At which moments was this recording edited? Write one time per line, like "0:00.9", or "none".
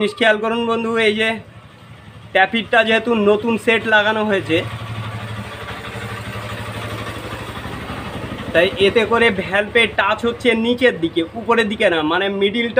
none